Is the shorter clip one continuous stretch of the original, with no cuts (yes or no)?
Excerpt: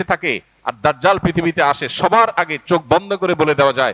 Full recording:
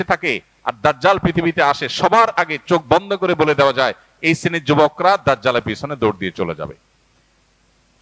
yes